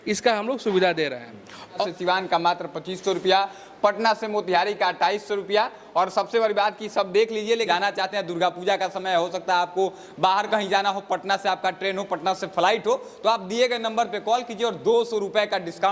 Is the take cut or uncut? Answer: cut